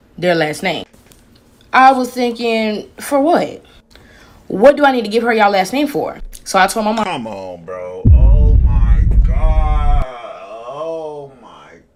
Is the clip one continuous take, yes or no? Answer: yes